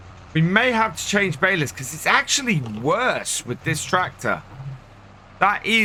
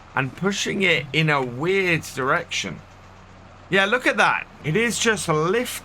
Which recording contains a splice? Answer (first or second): second